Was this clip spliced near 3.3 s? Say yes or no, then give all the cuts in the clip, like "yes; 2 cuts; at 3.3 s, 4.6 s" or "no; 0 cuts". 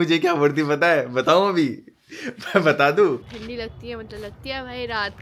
yes; 1 cut; at 3.3 s